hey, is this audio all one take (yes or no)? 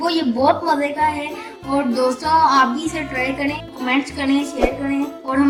yes